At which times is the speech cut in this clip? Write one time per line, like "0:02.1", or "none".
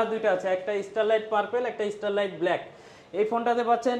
none